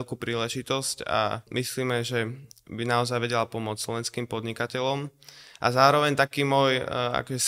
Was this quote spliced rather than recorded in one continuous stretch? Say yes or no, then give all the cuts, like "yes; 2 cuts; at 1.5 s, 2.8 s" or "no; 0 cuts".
yes; 1 cut; at 1.4 s